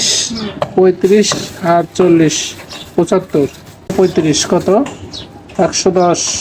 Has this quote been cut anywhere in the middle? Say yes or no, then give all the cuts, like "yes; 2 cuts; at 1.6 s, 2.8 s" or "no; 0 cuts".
yes; 1 cut; at 3.9 s